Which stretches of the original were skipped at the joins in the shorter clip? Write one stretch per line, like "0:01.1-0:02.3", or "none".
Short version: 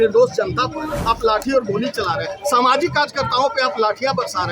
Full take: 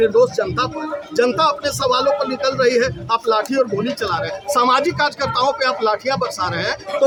0:01.0-0:03.0